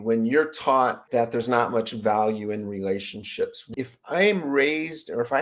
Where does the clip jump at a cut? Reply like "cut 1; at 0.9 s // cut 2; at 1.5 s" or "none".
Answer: cut 1; at 1.0 s // cut 2; at 3.6 s